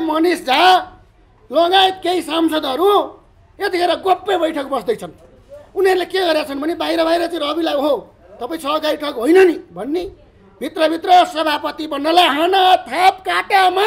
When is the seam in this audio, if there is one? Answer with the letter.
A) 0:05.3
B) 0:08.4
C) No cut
C